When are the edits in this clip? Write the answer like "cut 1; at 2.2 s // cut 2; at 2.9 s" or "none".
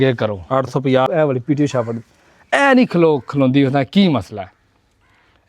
cut 1; at 1.1 s